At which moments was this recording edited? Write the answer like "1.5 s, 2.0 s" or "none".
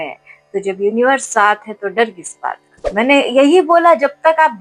2.8 s